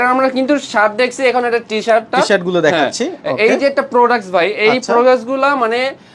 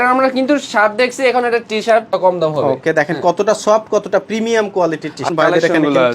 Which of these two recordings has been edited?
second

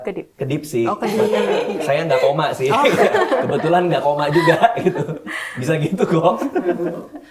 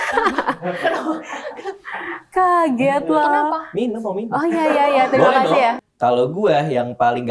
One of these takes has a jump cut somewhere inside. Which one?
second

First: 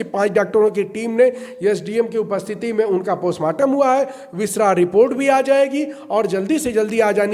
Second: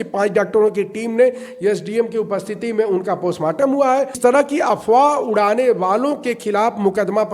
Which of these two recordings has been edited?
second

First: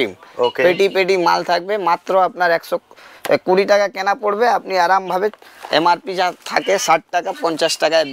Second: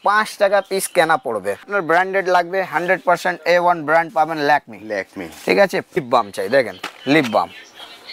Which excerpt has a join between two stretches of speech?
second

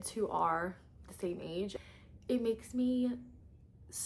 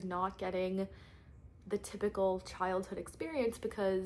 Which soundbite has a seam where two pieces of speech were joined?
first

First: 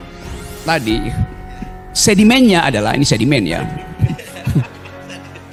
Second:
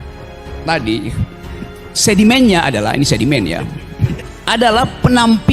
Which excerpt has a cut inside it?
second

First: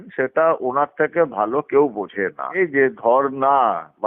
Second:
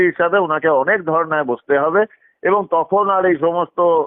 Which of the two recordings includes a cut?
first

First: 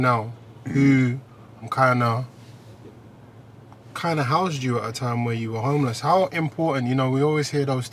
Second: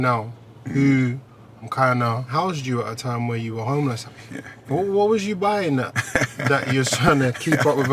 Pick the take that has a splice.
second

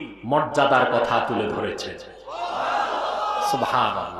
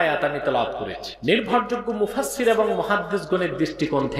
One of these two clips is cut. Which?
second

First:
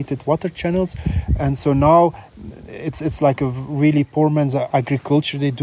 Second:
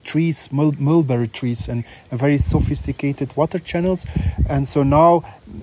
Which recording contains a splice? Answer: first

